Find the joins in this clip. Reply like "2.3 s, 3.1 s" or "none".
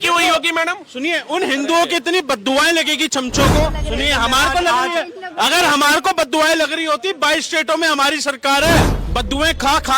3.8 s, 9.0 s